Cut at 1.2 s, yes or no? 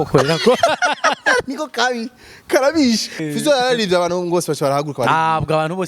no